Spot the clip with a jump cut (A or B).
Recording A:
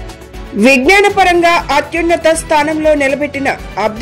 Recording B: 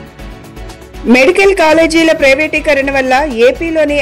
B